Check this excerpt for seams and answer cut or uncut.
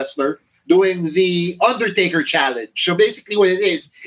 uncut